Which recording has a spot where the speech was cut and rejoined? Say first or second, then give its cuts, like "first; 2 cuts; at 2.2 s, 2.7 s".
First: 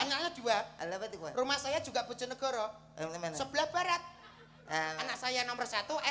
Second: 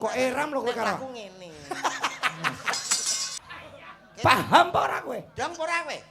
second; 1 cut; at 3.4 s